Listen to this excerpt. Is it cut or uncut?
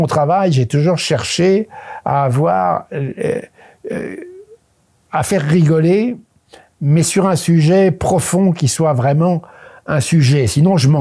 uncut